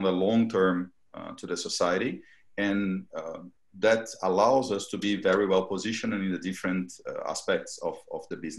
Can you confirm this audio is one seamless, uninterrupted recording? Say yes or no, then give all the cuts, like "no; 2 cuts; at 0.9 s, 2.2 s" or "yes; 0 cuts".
yes; 0 cuts